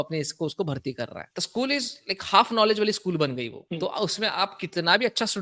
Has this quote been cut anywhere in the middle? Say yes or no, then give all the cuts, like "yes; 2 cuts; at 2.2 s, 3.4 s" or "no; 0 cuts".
no; 0 cuts